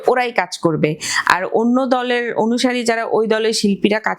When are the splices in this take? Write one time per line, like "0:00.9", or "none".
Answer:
none